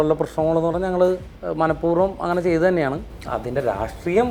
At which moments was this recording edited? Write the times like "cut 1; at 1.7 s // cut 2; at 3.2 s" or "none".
cut 1; at 1.4 s // cut 2; at 3.1 s